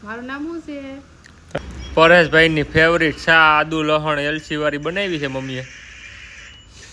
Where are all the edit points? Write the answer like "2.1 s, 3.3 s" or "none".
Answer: 1.6 s